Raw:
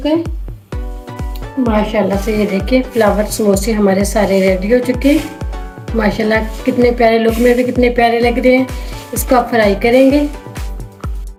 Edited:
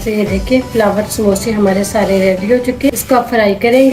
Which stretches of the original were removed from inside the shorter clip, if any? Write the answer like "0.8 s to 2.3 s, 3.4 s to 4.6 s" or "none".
5.1 s to 9.1 s